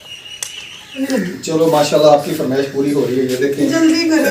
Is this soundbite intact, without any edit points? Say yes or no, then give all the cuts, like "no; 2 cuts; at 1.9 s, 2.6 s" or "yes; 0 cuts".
no; 1 cut; at 1.0 s